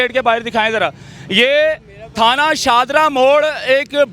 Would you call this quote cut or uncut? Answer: uncut